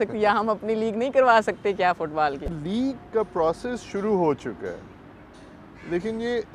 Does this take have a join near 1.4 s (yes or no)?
no